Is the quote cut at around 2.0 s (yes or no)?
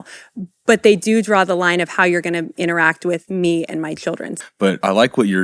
no